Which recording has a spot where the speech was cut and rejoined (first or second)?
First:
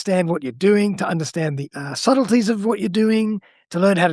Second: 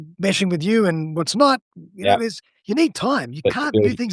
first